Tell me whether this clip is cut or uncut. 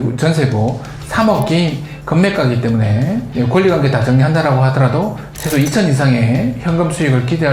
cut